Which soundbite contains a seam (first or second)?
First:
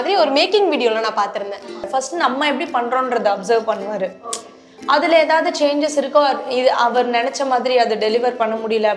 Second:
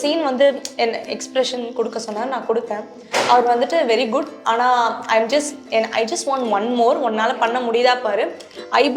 first